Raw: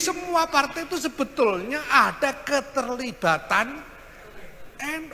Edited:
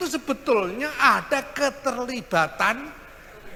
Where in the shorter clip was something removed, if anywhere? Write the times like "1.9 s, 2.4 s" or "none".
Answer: none